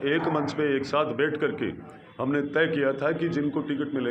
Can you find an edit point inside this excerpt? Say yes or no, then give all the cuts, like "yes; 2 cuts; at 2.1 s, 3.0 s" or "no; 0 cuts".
no; 0 cuts